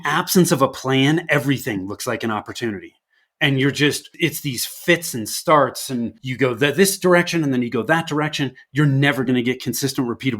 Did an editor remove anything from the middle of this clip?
yes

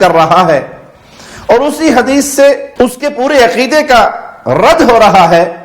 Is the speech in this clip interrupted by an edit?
yes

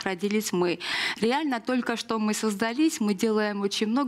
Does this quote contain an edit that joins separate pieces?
yes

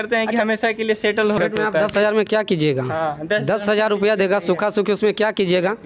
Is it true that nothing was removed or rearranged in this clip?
no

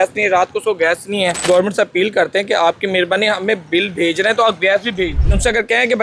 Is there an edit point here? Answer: yes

